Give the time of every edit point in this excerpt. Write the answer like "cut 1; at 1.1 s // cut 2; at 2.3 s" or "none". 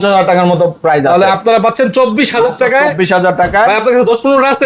none